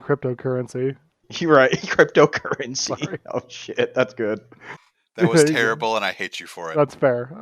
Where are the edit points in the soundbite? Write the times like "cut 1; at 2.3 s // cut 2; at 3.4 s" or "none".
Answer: cut 1; at 4.6 s